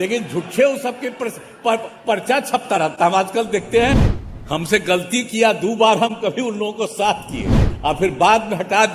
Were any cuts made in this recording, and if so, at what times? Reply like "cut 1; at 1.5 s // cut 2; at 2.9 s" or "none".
cut 1; at 4.2 s